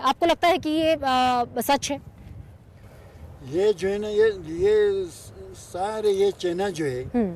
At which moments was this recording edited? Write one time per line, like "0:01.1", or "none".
none